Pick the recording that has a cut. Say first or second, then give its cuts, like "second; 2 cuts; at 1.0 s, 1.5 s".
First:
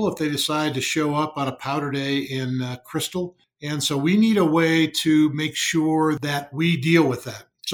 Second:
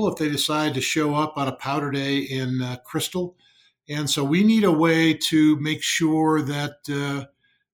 first; 2 cuts; at 3.5 s, 6.2 s